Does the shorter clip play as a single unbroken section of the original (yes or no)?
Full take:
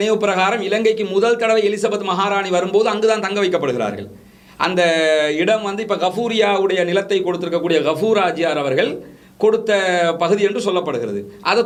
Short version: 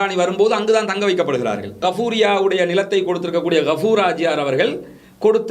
no